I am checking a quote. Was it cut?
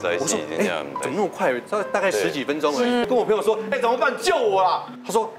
yes; 1 cut; at 3.1 s

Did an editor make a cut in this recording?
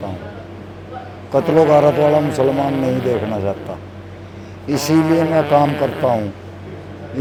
no; 0 cuts

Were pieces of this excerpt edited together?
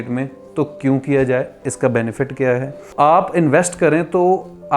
yes; 1 cut; at 2.9 s

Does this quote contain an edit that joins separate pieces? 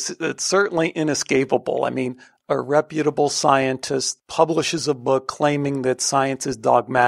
yes; 1 cut; at 4.1 s

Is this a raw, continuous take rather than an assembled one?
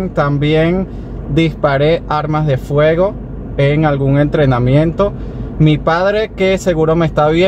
yes; 0 cuts

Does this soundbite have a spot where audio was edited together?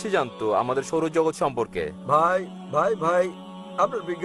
no; 0 cuts

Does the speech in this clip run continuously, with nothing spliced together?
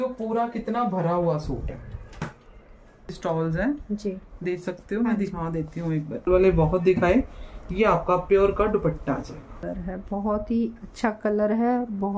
no; 3 cuts; at 3.2 s, 6.3 s, 9.6 s

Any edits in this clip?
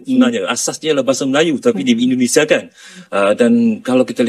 yes; 1 cut; at 3.0 s

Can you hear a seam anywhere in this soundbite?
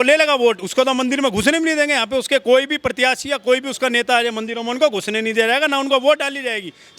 no; 0 cuts

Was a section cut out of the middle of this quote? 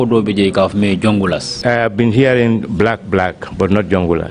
yes; 1 cut; at 1.5 s

